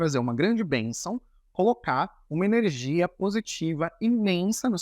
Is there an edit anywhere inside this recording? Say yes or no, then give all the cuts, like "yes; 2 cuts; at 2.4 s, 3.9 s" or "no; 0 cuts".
no; 0 cuts